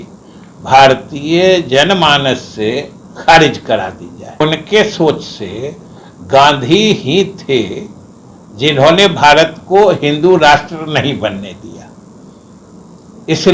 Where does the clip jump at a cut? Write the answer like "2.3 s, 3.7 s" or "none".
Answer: 4.4 s

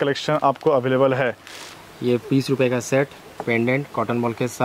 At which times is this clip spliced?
1.6 s

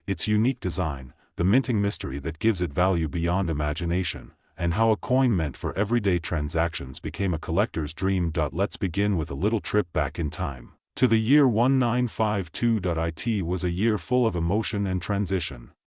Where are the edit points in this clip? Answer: none

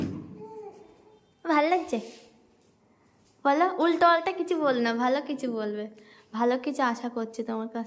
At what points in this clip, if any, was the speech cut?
none

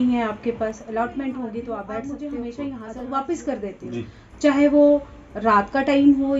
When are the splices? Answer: 2.0 s

